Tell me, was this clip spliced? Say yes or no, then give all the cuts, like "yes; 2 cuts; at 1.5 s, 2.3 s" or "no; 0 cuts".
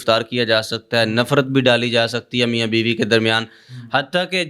no; 0 cuts